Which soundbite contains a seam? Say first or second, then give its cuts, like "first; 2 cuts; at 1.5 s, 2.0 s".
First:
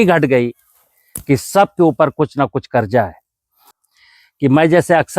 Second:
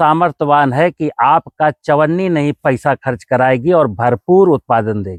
first; 1 cut; at 3.7 s